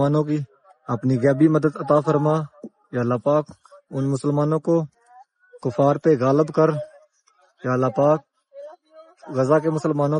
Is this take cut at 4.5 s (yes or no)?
no